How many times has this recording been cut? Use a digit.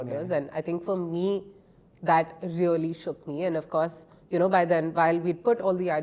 0